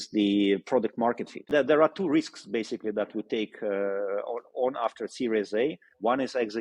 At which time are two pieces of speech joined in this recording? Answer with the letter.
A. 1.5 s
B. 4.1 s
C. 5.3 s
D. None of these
A